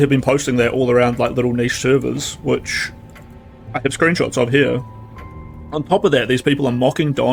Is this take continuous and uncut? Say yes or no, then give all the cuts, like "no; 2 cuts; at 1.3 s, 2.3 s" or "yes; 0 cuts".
yes; 0 cuts